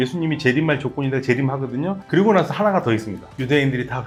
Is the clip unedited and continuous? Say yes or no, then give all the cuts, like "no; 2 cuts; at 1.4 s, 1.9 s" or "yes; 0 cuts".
yes; 0 cuts